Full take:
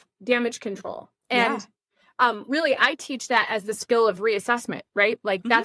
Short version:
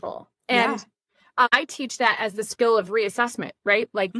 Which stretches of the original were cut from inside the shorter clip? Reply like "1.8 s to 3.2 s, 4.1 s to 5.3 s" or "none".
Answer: 2.3 s to 2.8 s